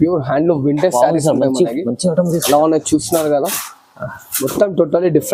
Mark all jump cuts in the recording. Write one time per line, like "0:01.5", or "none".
none

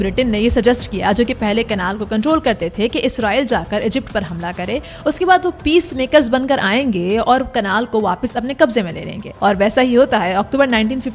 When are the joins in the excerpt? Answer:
none

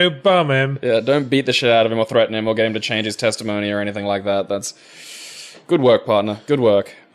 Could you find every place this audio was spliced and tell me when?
0:03.1

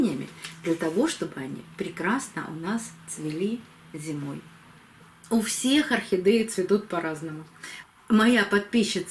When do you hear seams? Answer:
0:05.1

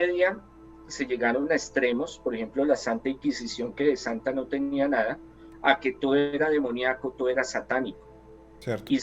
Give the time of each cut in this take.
none

